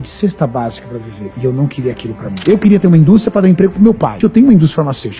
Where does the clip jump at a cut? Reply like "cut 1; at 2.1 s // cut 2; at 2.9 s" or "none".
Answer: cut 1; at 2.4 s // cut 2; at 4.2 s